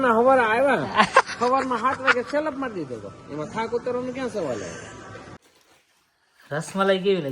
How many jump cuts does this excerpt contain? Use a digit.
1